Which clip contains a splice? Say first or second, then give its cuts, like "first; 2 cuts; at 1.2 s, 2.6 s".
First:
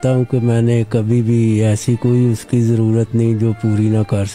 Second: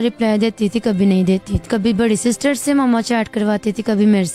second; 1 cut; at 1.6 s